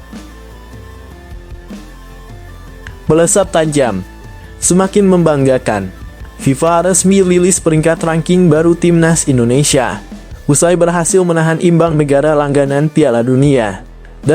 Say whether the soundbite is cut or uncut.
cut